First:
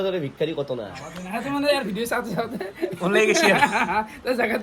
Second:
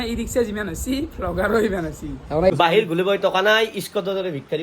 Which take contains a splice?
second; 1 cut; at 2.5 s

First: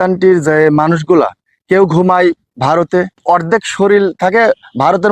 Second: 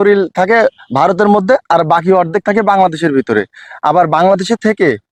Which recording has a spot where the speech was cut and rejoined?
first; 1 cut; at 2.9 s

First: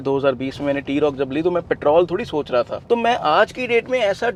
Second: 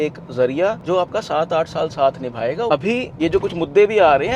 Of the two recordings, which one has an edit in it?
second; 1 cut; at 3.0 s

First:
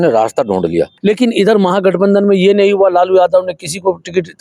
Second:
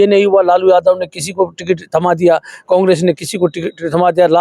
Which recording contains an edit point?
first; 1 cut; at 0.9 s

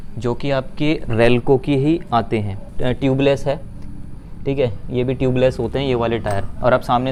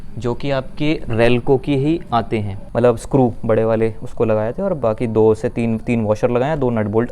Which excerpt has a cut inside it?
second; 1 cut; at 2.6 s

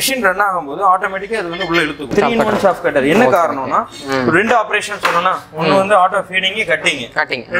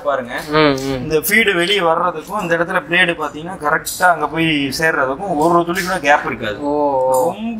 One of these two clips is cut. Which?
first; 1 cut; at 2.1 s

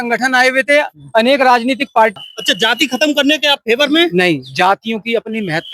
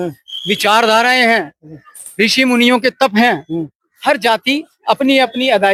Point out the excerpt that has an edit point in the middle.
first; 1 cut; at 2.2 s

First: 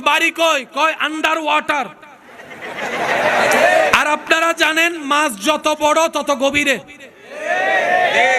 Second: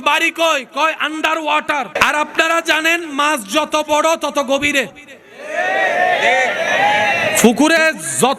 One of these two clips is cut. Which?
second; 1 cut; at 2.0 s

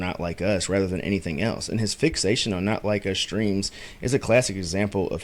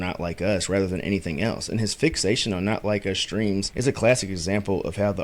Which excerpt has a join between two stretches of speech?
second; 1 cut; at 3.7 s

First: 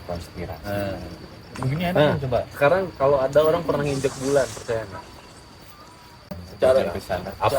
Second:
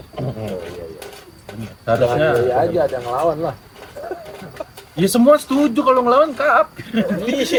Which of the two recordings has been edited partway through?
first; 1 cut; at 6.2 s

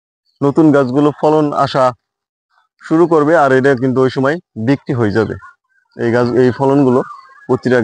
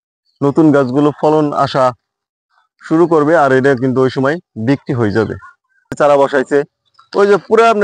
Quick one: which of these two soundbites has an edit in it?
second; 1 cut; at 5.9 s

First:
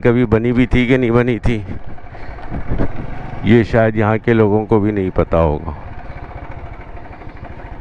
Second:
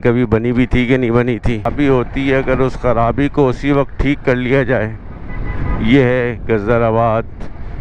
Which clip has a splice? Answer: second; 1 cut; at 1.7 s

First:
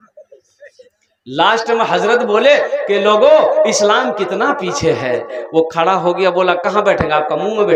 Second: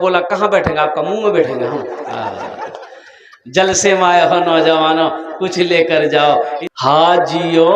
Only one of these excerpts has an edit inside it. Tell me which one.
second; 1 cut; at 6.5 s

